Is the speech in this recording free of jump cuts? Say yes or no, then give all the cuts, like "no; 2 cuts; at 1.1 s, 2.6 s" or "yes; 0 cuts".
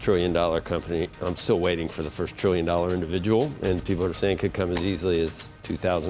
yes; 0 cuts